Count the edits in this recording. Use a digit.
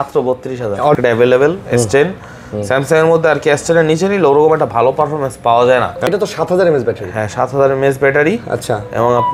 2